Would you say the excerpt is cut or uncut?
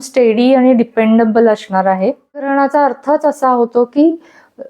cut